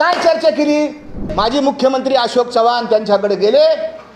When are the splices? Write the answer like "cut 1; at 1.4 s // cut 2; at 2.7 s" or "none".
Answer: cut 1; at 1.3 s